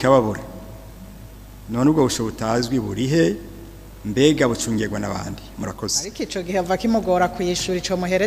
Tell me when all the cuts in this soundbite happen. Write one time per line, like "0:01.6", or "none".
0:06.0